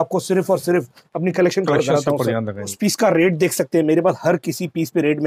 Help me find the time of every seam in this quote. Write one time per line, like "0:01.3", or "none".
0:02.7